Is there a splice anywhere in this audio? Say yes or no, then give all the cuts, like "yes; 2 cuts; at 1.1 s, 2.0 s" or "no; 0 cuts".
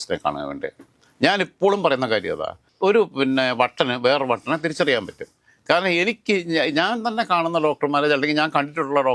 no; 0 cuts